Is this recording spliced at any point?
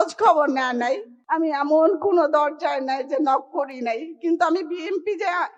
yes; 1 cut; at 1.1 s

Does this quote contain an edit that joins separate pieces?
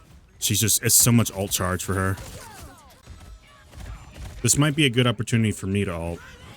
yes; 1 cut; at 3.0 s

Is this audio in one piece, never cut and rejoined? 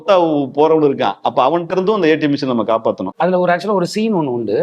no; 1 cut; at 3.1 s

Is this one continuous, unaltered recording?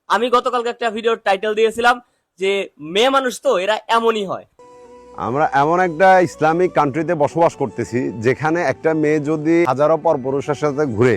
no; 1 cut; at 4.5 s

